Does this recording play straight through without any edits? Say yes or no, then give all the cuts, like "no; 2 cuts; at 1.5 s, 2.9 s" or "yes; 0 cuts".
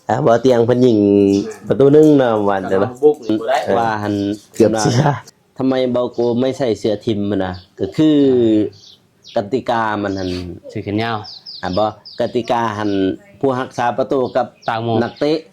no; 1 cut; at 5.3 s